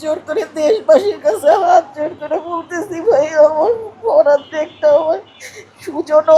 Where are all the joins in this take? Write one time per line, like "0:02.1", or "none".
none